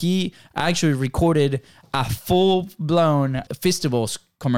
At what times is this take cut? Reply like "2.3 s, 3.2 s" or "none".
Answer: 3.4 s